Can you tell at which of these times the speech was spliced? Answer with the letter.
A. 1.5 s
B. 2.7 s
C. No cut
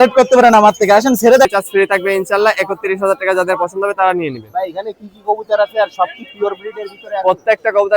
A